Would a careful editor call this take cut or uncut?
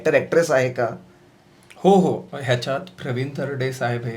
uncut